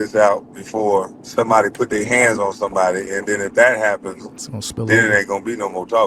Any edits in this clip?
yes; 1 cut; at 1.2 s

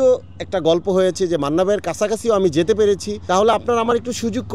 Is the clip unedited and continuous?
no; 1 cut; at 3.1 s

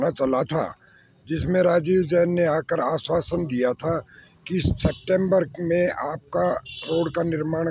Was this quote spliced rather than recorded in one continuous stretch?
no; 0 cuts

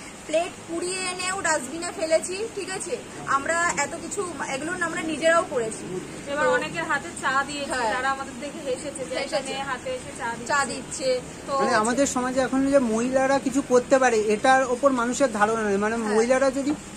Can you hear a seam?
no; 0 cuts

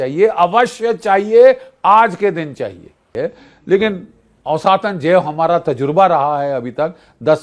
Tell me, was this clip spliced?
yes; 1 cut; at 3.0 s

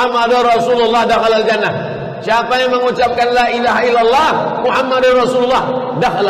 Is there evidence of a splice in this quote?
no; 0 cuts

